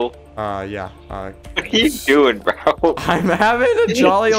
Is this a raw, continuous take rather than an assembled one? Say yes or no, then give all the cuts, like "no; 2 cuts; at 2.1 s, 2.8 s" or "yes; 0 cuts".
yes; 0 cuts